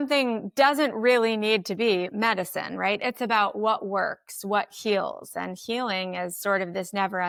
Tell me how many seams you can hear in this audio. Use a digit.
0